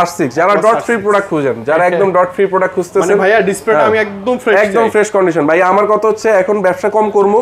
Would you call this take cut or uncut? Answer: uncut